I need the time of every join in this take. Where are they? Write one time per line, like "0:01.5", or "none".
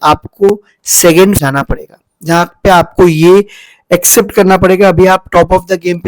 0:01.4